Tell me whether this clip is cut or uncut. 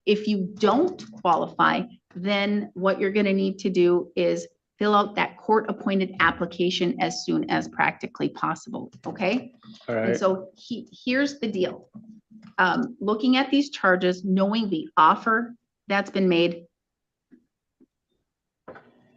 uncut